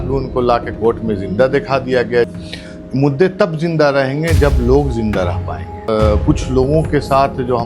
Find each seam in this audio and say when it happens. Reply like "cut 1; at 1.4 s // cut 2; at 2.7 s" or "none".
cut 1; at 2.3 s // cut 2; at 5.9 s

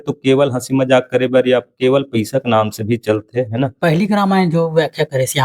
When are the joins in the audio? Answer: cut 1; at 3.7 s

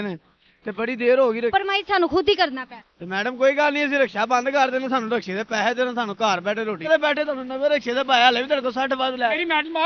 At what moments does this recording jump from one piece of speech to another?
cut 1; at 1.5 s // cut 2; at 6.9 s

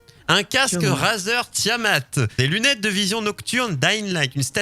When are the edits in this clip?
cut 1; at 2.3 s

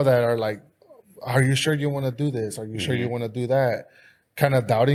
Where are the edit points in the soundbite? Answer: none

